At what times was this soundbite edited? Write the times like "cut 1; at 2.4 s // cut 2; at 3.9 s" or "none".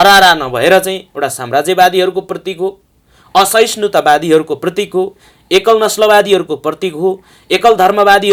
none